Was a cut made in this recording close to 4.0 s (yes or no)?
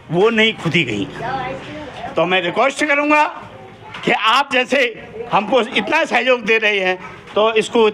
no